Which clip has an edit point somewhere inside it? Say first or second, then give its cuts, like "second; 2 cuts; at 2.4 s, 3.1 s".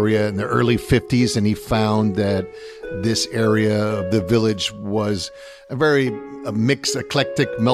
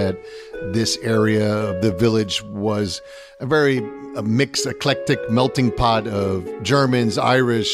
second; 1 cut; at 6.5 s